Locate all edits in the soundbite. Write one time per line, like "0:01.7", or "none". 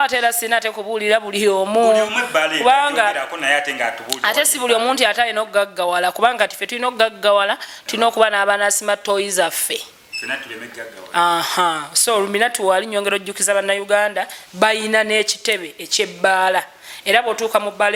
none